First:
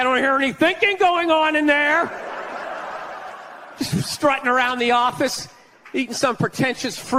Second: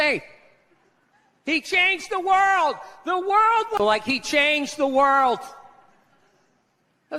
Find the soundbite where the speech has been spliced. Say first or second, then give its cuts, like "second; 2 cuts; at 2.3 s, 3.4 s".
second; 1 cut; at 3.8 s